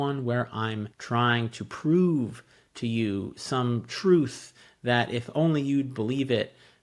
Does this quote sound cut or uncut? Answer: cut